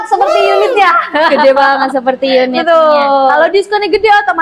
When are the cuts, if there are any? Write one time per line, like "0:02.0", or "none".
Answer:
none